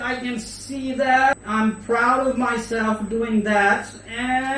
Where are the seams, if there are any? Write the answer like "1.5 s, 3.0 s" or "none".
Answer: 1.4 s